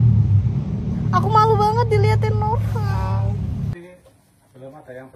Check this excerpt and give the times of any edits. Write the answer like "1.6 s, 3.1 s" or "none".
3.7 s

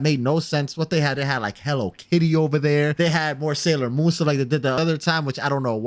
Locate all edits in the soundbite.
2.9 s, 4.8 s

